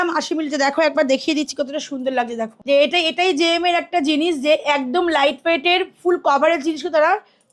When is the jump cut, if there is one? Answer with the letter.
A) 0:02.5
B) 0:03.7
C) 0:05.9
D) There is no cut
A